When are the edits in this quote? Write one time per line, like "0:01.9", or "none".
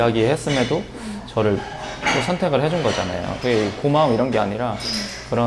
none